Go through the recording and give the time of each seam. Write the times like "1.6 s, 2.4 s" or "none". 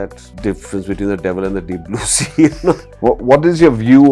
2.8 s